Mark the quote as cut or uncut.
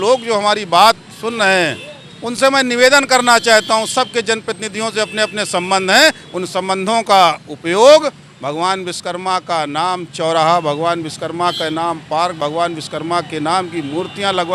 uncut